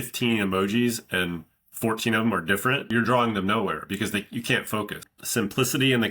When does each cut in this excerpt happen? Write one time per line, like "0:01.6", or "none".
0:02.9
0:05.0